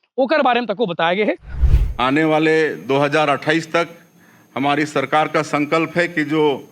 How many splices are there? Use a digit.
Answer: 1